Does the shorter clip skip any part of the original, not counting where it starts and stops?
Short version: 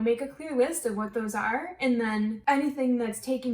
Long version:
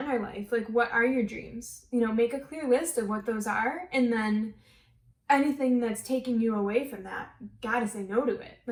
yes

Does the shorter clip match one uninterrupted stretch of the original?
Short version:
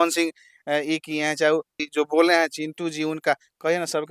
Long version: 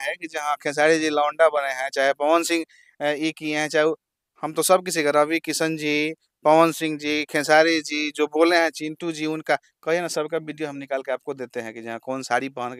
no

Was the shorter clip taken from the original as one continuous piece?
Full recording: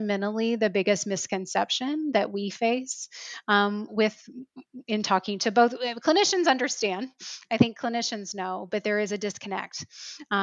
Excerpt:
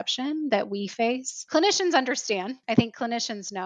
no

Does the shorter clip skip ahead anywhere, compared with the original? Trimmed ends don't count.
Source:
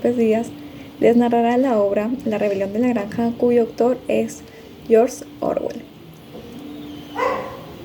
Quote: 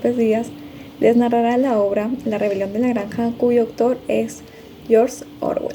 no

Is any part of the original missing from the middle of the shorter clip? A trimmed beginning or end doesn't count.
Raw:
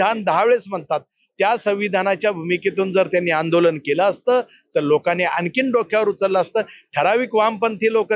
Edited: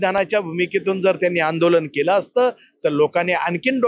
no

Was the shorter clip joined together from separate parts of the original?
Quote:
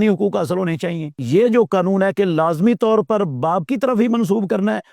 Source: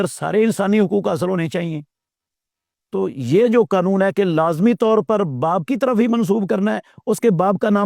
yes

